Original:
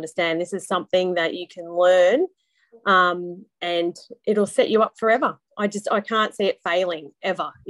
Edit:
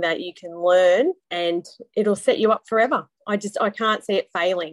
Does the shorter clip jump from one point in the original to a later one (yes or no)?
yes